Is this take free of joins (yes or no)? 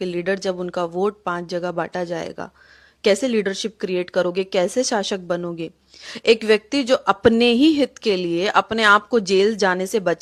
yes